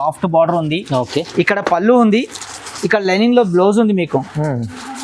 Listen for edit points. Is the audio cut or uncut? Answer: uncut